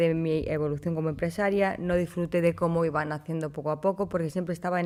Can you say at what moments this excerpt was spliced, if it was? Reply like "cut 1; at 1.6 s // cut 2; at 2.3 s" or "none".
none